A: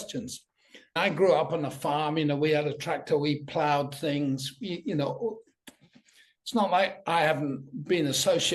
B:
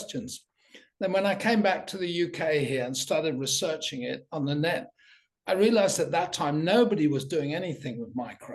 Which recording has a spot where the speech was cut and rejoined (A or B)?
A